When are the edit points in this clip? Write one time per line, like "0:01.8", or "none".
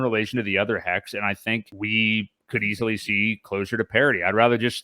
0:01.7